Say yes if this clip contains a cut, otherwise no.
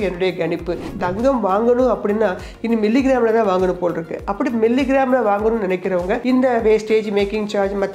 yes